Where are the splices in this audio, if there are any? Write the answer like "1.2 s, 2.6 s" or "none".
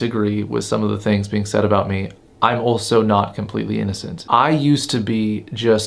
4.1 s